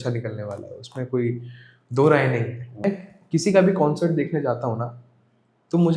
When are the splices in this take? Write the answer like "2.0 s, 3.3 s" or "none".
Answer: 2.9 s